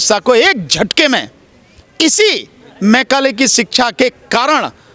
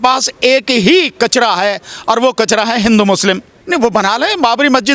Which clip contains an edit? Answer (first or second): second